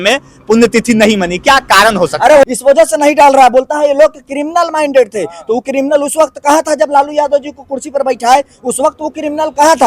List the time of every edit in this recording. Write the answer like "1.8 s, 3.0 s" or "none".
2.4 s